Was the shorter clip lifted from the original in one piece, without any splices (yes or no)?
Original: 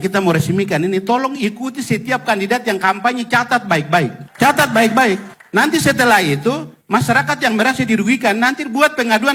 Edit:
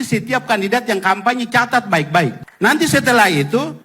no